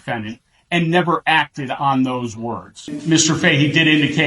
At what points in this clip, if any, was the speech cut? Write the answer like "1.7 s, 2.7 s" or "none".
2.9 s

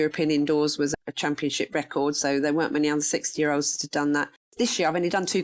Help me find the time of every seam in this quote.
0.9 s, 4.4 s

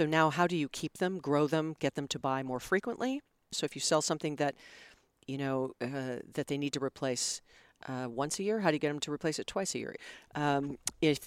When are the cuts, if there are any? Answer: 3.6 s, 9.9 s

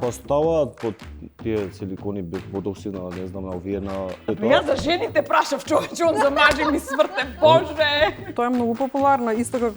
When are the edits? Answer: 4.2 s, 8.3 s

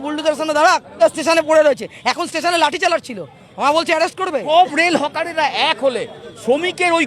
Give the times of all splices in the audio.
0.9 s, 4.4 s

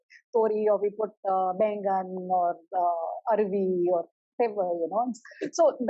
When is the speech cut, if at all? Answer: none

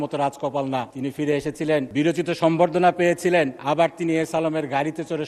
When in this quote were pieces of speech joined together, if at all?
0.9 s, 1.9 s, 3.6 s

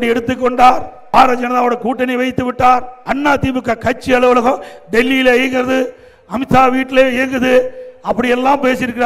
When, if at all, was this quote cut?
0.9 s, 3.0 s

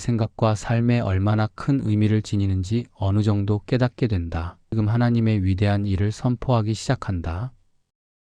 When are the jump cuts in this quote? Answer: 4.7 s

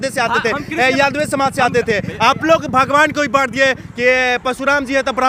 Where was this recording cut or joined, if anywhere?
none

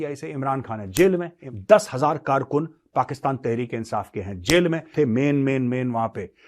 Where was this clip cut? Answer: 1.4 s, 4.9 s

